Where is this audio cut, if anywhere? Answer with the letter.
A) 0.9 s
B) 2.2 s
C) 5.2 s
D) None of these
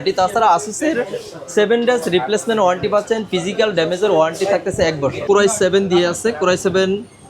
C